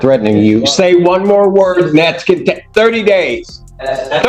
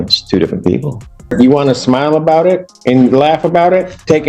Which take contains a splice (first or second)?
second